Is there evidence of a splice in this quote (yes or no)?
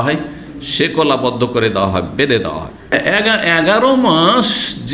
yes